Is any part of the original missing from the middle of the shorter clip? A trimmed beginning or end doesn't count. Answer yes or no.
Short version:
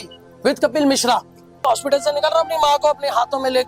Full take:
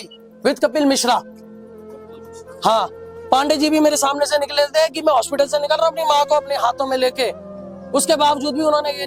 yes